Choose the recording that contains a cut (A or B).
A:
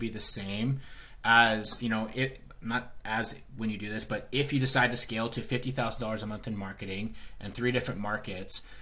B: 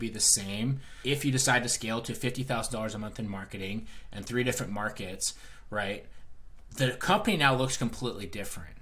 B